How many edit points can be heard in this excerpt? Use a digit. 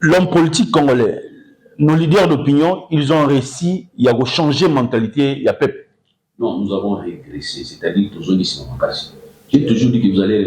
0